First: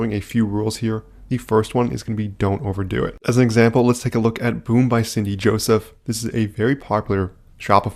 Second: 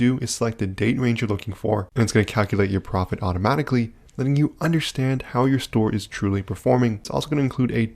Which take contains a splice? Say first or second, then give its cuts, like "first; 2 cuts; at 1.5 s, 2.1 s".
second; 1 cut; at 7.0 s